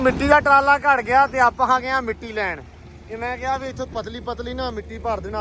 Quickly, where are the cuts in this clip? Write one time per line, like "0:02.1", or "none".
none